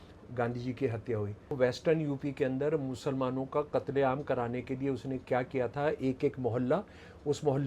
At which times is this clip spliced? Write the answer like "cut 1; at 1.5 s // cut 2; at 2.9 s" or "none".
cut 1; at 1.6 s